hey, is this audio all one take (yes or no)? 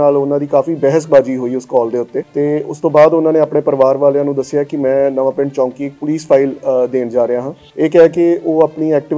no